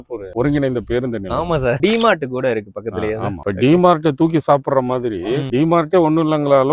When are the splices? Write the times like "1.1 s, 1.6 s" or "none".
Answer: 1.8 s, 3.4 s, 5.4 s